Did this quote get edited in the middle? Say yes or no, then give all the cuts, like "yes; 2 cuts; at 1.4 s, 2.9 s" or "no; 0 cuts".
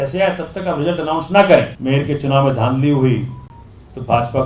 yes; 1 cut; at 1.7 s